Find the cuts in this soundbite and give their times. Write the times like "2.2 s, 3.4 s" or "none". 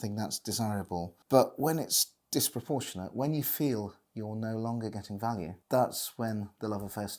1.2 s, 5.6 s

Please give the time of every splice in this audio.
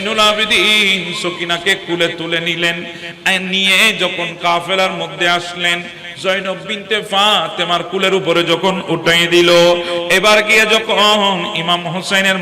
none

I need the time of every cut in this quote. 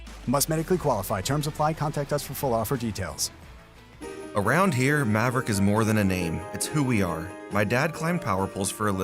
3.8 s

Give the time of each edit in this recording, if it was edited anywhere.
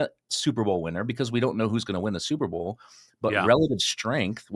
none

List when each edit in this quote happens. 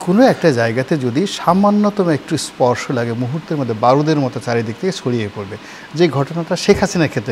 none

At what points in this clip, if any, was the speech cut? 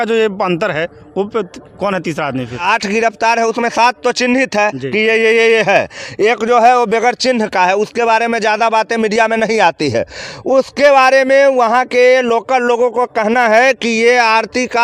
2.6 s

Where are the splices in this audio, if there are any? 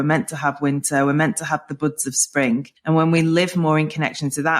2.7 s

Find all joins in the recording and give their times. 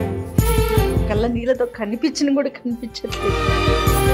none

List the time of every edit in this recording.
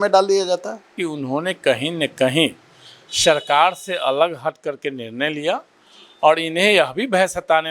0.9 s

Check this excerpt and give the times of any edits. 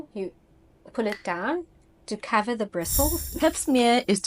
3.4 s

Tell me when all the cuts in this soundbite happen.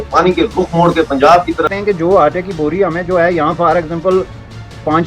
1.6 s

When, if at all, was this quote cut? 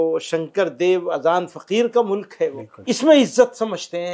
2.8 s

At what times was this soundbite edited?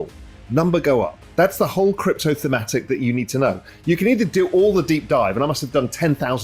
1.2 s

